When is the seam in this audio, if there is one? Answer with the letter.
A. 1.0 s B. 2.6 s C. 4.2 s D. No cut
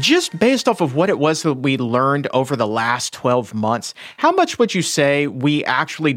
D